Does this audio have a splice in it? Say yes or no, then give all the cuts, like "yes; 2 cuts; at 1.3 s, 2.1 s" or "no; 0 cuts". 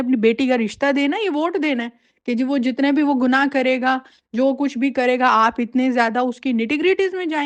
no; 0 cuts